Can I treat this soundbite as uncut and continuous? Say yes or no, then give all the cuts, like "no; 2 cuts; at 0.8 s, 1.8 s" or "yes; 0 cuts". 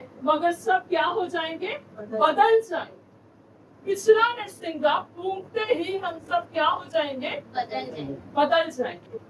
yes; 0 cuts